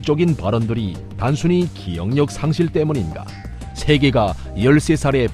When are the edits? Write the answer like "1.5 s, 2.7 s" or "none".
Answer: none